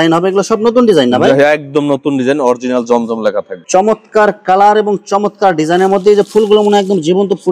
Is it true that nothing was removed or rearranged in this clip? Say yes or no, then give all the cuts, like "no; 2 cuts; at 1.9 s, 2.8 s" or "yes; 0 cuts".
no; 1 cut; at 3.6 s